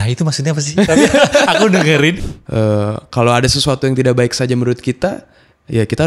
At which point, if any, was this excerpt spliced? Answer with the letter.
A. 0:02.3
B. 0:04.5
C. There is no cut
A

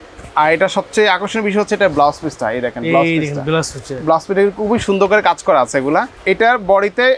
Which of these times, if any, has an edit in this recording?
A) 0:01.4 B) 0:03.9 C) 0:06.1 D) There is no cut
C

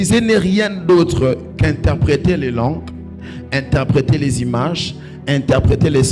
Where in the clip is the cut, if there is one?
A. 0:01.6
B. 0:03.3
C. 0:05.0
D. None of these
D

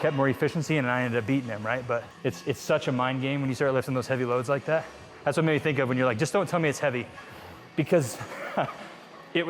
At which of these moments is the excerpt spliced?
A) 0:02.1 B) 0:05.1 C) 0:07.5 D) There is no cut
A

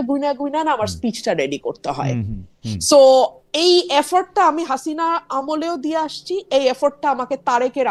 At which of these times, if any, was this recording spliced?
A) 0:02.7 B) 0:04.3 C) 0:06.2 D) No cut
D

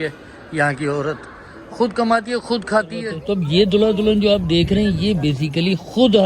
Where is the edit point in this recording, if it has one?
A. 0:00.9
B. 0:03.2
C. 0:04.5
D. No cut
B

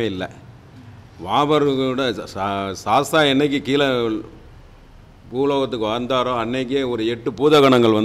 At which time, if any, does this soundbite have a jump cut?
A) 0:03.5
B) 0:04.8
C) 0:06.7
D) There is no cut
D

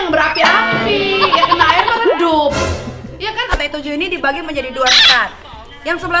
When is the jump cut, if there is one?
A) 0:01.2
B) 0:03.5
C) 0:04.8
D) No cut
B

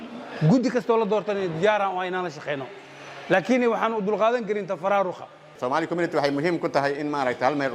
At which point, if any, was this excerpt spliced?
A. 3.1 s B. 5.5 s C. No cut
B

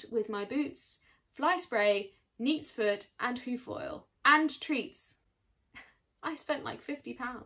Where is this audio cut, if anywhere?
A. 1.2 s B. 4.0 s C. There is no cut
B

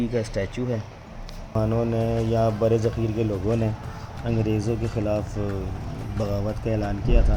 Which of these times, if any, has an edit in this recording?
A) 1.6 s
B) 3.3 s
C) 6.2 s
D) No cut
A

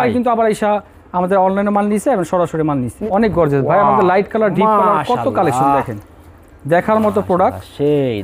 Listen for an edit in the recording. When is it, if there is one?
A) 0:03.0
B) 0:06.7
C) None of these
A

